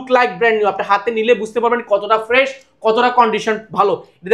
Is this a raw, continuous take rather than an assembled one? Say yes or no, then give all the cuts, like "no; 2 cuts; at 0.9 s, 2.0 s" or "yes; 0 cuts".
yes; 0 cuts